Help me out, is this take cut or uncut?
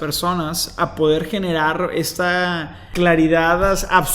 cut